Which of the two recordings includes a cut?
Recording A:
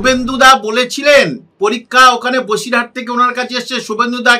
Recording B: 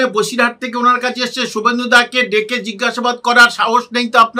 A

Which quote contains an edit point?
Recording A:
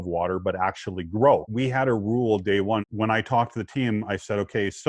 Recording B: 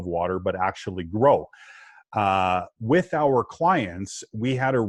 A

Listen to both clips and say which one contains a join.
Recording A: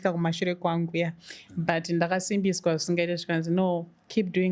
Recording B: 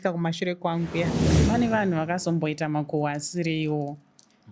B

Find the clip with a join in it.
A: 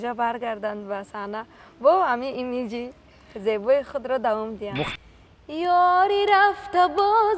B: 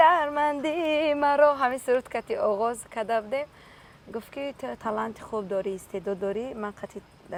A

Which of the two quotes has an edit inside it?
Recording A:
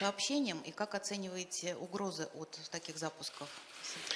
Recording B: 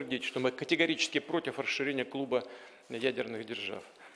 B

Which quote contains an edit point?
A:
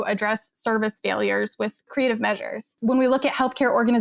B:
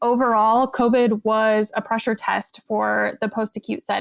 A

